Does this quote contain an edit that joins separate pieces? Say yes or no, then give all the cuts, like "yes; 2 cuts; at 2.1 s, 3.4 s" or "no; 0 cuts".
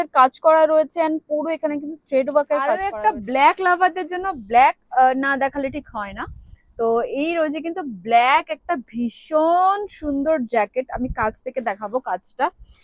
yes; 1 cut; at 2.7 s